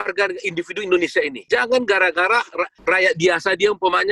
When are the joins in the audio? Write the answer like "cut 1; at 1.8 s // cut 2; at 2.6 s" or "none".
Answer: cut 1; at 1.4 s // cut 2; at 2.7 s

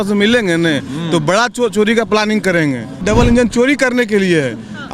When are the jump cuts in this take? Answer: cut 1; at 3.0 s

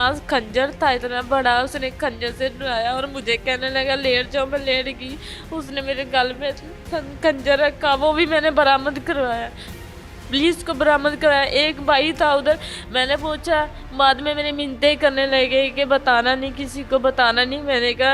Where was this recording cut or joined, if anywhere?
none

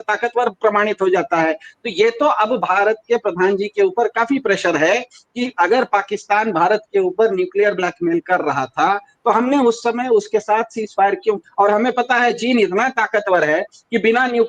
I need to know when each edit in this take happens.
cut 1; at 11.4 s

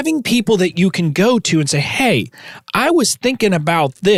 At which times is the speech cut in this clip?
none

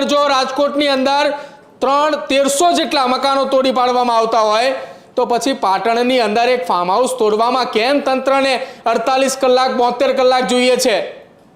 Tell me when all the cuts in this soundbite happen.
none

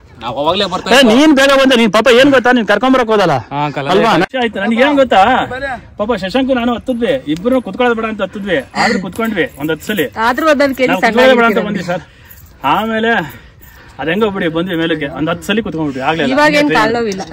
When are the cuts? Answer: cut 1; at 4.2 s

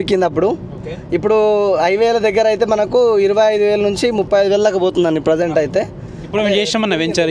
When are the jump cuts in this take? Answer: none

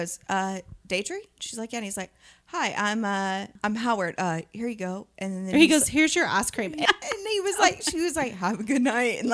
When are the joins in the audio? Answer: cut 1; at 3.5 s // cut 2; at 6.8 s

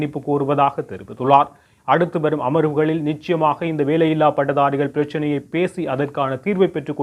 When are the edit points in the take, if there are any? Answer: none

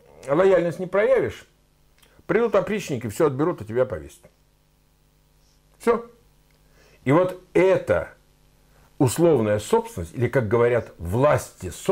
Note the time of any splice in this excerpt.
none

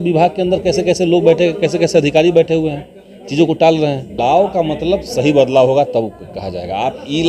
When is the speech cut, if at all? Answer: cut 1; at 4.1 s

